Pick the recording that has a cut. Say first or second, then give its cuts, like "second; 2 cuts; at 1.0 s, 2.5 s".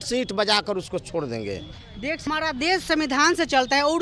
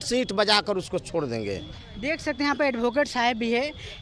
first; 1 cut; at 2.2 s